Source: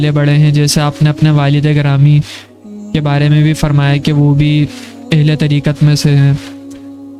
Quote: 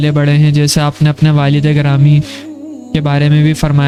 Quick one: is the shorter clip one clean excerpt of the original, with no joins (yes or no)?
yes